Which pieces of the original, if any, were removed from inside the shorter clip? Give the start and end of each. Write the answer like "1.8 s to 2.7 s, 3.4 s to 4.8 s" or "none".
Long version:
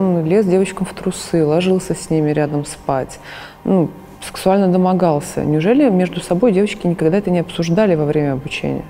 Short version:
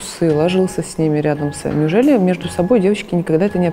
2.7 s to 5.3 s